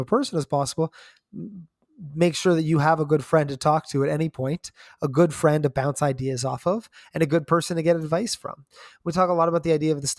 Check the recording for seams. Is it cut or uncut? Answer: uncut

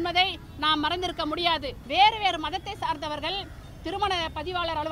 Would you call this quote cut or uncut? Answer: cut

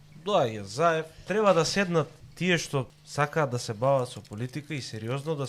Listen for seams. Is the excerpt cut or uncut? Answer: cut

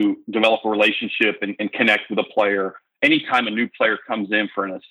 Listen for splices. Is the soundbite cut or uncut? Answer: uncut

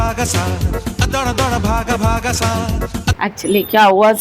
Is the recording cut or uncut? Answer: cut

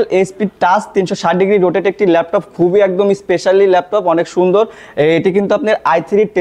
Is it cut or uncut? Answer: uncut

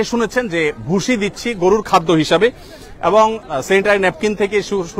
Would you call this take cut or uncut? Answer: uncut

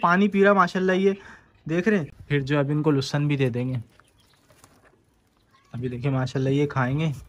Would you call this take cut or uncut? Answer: cut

